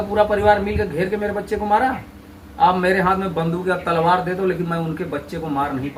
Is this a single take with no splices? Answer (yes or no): yes